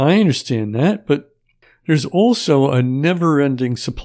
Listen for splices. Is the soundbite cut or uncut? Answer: uncut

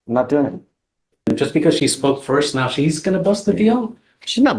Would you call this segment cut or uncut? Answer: cut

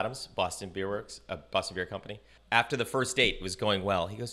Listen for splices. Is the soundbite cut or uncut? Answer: cut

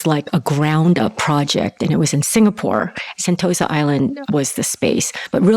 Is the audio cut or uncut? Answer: cut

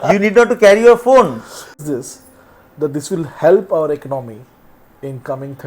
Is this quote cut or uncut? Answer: cut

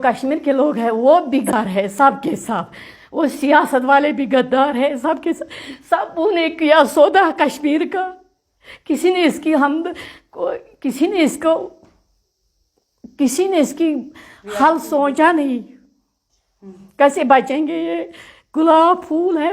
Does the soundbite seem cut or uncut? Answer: cut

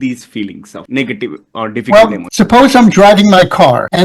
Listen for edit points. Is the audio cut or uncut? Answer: cut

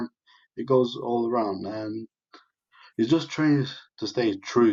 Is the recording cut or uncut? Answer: uncut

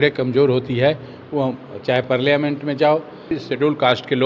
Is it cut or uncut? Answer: cut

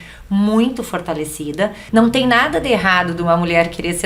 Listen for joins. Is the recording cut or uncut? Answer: cut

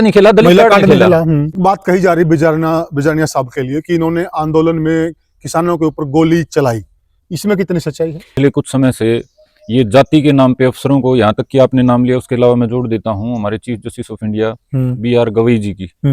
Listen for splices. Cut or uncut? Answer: cut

